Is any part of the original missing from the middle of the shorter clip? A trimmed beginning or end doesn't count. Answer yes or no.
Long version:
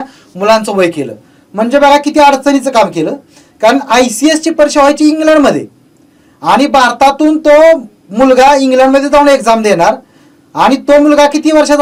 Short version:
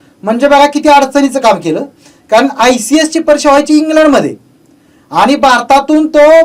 no